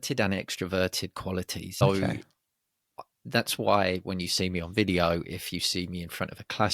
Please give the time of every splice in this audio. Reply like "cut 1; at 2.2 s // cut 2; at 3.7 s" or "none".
cut 1; at 1.8 s